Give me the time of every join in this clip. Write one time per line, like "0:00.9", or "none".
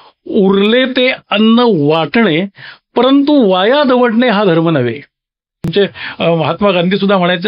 0:05.7